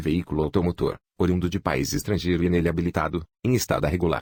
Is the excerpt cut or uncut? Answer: uncut